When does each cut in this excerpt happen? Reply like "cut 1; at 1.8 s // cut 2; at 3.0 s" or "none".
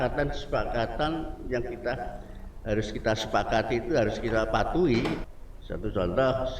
cut 1; at 5.3 s